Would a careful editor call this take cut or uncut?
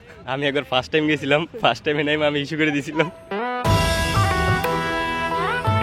uncut